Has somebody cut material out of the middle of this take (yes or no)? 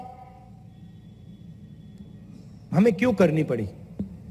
no